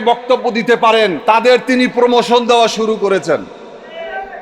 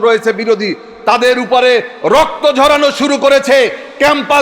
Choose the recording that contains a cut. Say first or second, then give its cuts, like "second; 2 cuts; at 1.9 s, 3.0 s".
first; 1 cut; at 1.2 s